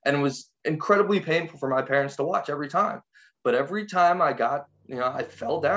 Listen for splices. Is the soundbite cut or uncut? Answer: cut